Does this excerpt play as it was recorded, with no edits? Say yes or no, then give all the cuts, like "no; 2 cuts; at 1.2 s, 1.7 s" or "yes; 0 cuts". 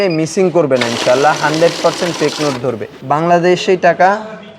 no; 1 cut; at 2.9 s